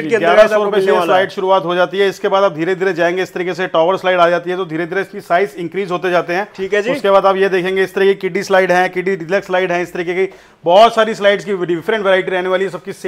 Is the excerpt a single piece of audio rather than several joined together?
yes; 0 cuts

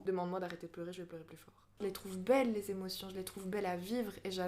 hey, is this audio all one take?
no; 1 cut; at 1.8 s

